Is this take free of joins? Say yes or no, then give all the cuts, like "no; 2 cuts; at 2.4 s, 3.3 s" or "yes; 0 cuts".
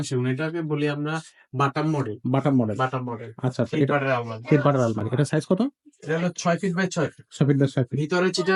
yes; 0 cuts